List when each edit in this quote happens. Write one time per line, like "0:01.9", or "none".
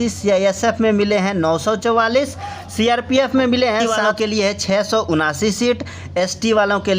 0:04.0